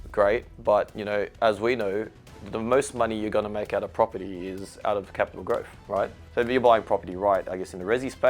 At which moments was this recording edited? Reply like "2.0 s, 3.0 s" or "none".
6.2 s